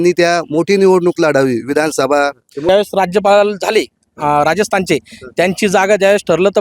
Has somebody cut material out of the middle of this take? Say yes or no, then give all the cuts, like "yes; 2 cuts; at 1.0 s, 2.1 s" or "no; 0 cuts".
yes; 1 cut; at 2.7 s